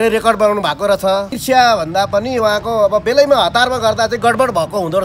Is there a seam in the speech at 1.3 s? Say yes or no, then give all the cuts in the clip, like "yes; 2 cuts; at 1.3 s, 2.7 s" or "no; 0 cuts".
yes; 1 cut; at 1.3 s